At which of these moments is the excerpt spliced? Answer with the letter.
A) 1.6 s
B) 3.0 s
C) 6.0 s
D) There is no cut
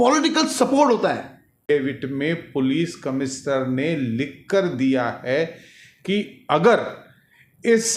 A